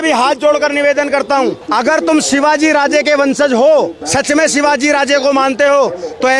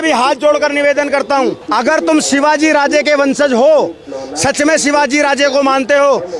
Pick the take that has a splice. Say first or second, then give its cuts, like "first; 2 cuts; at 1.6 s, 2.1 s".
first; 1 cut; at 4.0 s